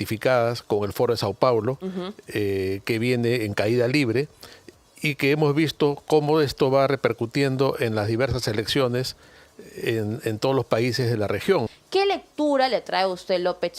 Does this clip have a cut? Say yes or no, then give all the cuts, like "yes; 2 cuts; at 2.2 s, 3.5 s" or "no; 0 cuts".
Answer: yes; 1 cut; at 11.7 s